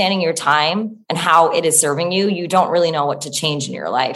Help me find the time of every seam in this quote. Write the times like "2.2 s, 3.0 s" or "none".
1.0 s